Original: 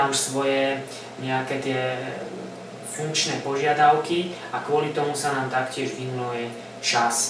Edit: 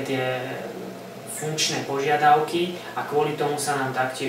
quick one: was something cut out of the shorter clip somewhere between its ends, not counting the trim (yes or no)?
no